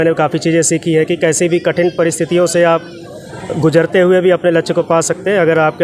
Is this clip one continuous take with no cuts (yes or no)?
yes